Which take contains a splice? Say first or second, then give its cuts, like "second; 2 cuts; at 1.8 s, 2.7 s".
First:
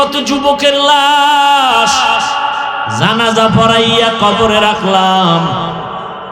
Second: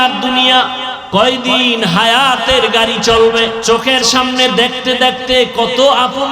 second; 2 cuts; at 0.9 s, 3.6 s